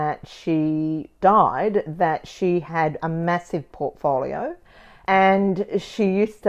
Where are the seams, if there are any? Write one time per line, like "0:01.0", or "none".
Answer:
none